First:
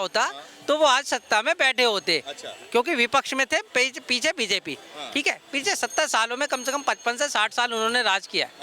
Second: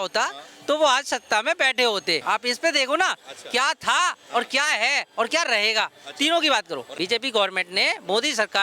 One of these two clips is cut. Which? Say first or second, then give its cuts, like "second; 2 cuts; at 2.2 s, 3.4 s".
second; 2 cuts; at 2.2 s, 6.9 s